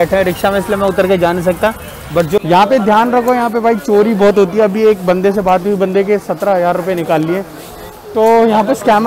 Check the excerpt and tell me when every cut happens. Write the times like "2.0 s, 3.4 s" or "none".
2.4 s